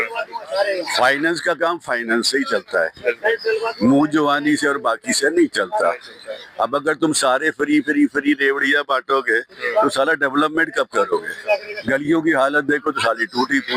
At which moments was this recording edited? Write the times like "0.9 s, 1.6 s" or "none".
none